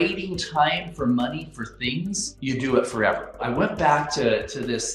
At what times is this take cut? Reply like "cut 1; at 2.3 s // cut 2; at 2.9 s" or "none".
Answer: cut 1; at 3.5 s